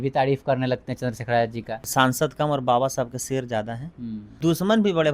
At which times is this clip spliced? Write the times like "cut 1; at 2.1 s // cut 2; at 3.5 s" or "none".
cut 1; at 1.8 s // cut 2; at 4.3 s

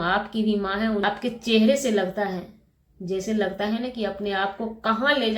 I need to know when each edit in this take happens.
cut 1; at 1.0 s

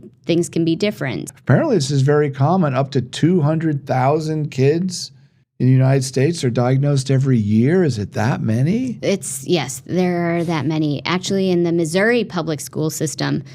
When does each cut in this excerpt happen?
cut 1; at 1.2 s

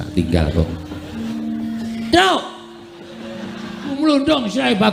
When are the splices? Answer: cut 1; at 1.4 s // cut 2; at 4.0 s

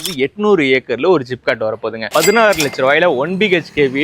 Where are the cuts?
cut 1; at 2.0 s

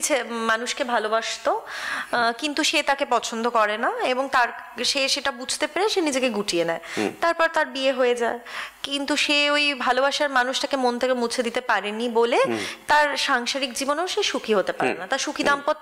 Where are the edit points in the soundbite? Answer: none

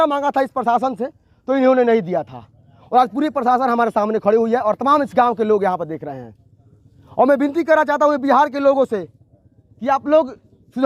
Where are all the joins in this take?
none

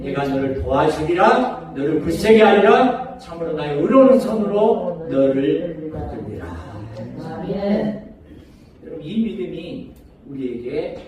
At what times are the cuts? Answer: none

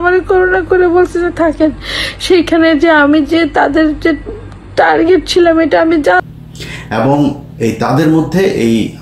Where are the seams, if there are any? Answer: cut 1; at 6.3 s

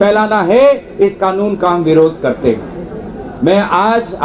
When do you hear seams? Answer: none

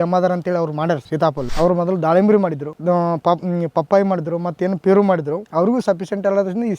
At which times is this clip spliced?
cut 1; at 1.2 s // cut 2; at 2.7 s // cut 3; at 5.4 s

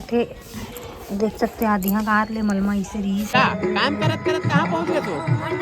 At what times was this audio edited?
cut 1; at 3.3 s

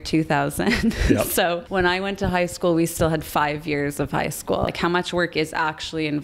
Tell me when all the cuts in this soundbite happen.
cut 1; at 1.6 s // cut 2; at 4.7 s

